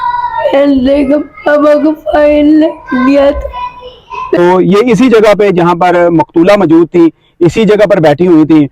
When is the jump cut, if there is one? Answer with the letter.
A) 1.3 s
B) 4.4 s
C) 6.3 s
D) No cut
B